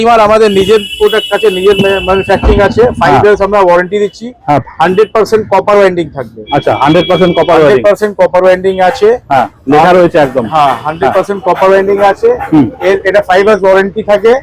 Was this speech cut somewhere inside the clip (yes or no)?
no